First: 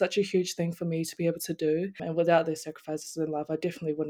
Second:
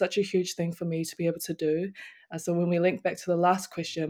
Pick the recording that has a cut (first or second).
first